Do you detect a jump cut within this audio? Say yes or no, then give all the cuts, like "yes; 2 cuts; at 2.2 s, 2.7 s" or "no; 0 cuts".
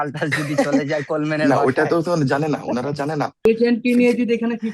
yes; 1 cut; at 3.4 s